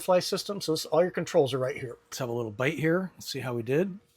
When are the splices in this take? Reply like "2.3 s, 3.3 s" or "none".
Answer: 2.2 s